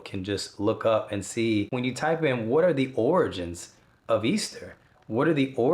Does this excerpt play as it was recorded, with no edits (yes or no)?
no